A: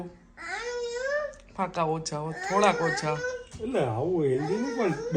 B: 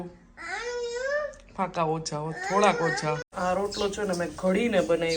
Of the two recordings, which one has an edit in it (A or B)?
B